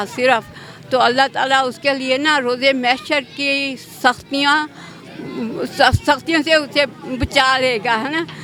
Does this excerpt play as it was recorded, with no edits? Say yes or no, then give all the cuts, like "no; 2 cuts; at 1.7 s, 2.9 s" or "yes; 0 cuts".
yes; 0 cuts